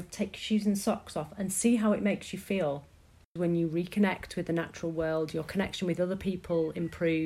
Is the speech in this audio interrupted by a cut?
yes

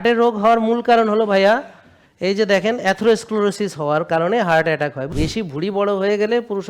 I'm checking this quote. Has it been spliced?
yes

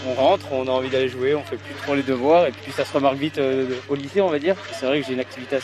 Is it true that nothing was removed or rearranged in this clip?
no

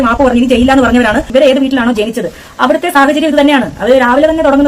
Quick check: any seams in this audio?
yes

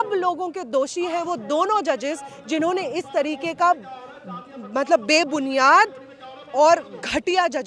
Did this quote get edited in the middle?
no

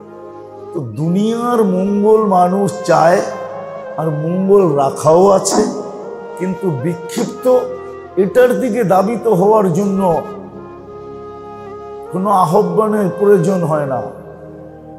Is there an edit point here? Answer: yes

